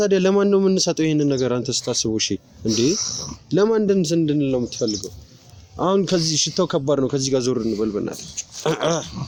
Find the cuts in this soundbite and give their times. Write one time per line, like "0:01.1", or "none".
none